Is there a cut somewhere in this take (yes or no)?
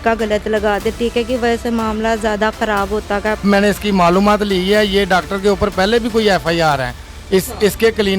yes